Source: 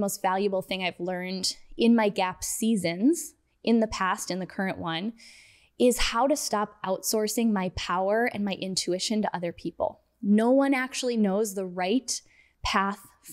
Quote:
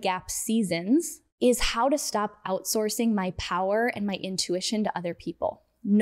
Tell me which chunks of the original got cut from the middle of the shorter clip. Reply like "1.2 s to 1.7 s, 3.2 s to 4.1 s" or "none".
3.3 s to 5.6 s